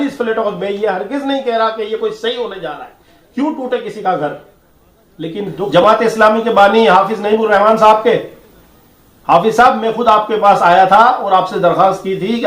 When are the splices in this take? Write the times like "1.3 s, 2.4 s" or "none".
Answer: 5.7 s